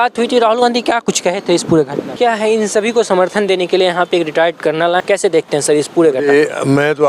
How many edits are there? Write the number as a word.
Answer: two